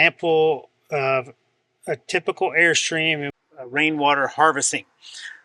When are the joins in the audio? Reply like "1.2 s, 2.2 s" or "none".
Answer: 3.3 s